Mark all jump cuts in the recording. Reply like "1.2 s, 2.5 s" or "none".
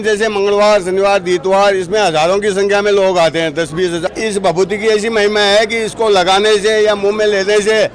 4.1 s